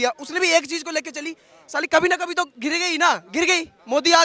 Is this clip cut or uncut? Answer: uncut